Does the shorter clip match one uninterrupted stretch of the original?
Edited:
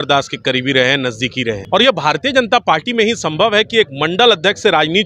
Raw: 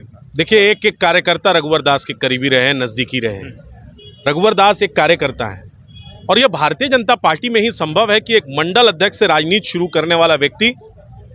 no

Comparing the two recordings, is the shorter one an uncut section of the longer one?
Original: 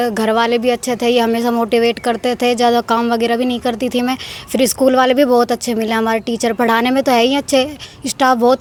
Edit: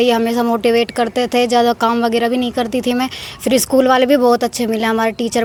yes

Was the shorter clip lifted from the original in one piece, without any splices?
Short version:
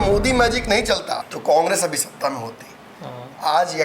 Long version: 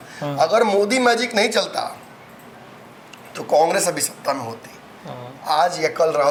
no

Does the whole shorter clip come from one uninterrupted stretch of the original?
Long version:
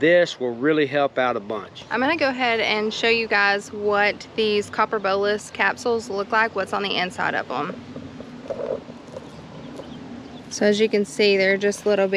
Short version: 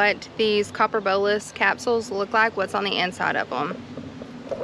yes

